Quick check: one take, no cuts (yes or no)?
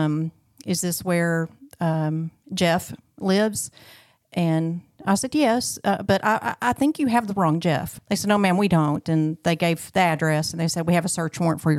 no